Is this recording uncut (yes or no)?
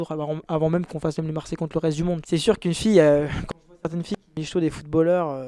no